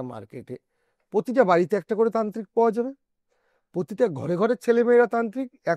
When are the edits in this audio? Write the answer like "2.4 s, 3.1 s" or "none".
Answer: none